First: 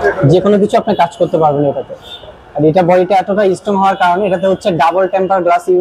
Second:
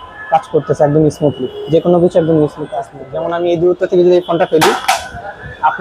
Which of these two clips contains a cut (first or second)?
second